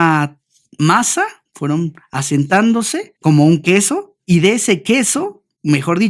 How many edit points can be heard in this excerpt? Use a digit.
3